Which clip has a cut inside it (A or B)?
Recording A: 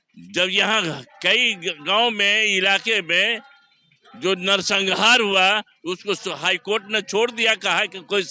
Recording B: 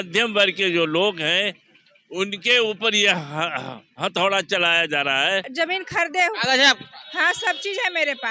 B